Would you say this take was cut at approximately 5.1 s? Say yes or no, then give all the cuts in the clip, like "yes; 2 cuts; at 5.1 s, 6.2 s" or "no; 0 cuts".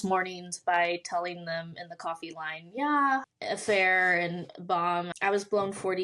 yes; 2 cuts; at 3.3 s, 5.1 s